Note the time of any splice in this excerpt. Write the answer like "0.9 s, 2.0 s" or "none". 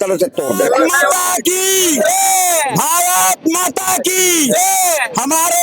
1.0 s